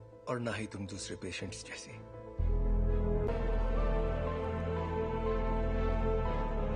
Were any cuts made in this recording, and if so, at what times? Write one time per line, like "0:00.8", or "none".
0:03.3